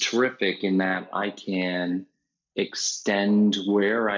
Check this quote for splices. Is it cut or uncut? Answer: uncut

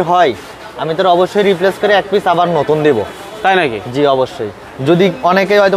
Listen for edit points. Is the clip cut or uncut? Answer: uncut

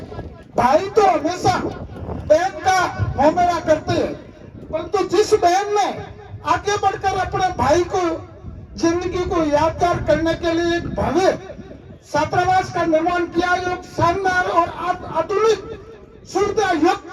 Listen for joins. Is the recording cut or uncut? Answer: uncut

